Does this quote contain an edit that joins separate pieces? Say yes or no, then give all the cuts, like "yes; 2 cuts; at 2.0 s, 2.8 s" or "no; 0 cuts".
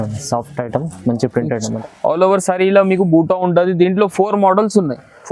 yes; 1 cut; at 1.7 s